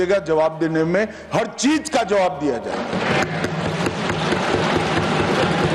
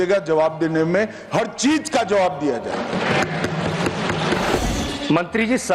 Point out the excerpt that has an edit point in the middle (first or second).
second